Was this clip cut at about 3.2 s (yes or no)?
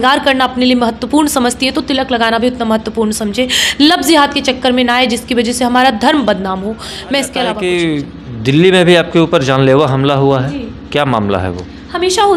no